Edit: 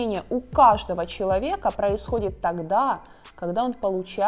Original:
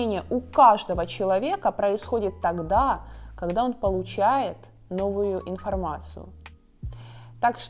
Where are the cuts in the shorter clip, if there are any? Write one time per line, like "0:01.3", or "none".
none